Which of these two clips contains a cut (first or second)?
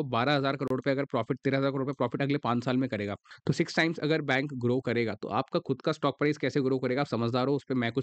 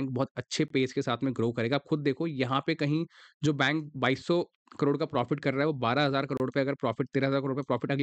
first